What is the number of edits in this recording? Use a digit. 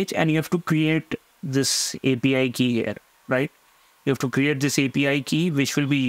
0